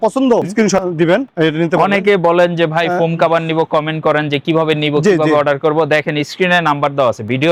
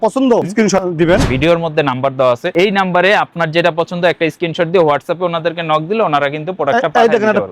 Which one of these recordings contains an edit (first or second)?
second